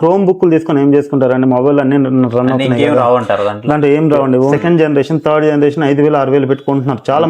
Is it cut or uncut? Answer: cut